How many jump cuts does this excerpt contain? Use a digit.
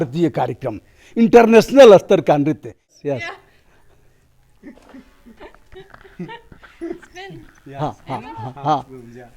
1